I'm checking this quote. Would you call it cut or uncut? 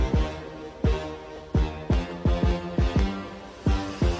uncut